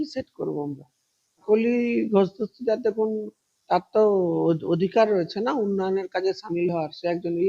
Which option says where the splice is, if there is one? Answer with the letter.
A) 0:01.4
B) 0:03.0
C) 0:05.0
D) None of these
A